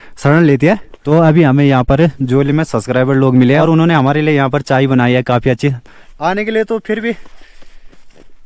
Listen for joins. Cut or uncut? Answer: cut